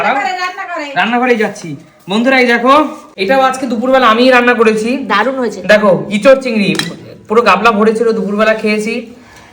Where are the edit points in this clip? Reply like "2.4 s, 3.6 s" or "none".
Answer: 3.1 s